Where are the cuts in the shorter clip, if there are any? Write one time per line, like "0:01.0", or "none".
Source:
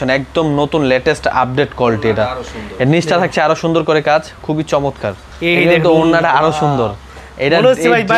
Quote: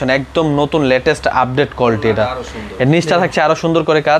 none